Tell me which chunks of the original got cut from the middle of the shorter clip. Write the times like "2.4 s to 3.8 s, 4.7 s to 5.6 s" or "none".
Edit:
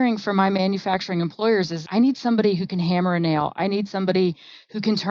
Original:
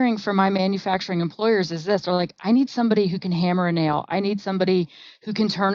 1.8 s to 2.3 s